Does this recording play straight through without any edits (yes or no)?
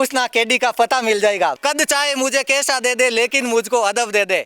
no